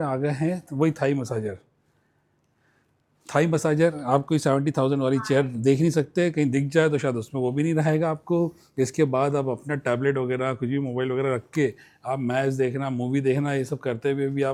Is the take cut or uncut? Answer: uncut